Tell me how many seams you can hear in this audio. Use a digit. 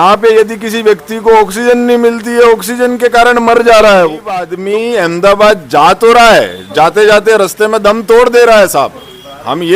1